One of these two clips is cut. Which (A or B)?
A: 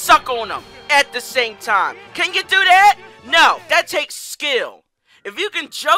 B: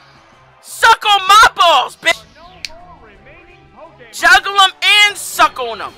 B